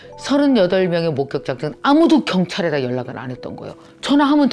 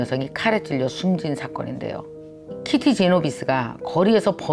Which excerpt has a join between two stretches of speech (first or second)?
second